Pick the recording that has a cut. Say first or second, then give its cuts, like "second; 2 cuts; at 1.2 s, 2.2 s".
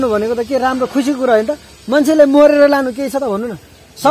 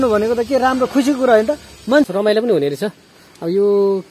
second; 1 cut; at 1.8 s